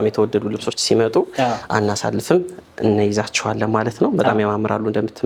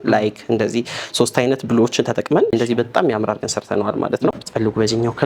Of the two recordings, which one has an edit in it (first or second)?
second